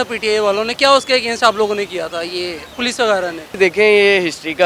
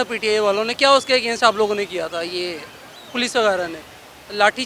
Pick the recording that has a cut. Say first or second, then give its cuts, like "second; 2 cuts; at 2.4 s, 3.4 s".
first; 2 cuts; at 2.6 s, 3.5 s